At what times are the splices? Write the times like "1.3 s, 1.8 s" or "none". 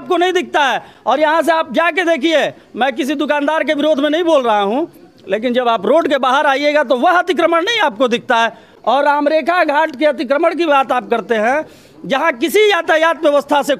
none